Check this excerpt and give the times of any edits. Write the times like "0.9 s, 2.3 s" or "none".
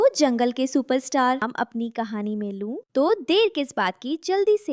1.5 s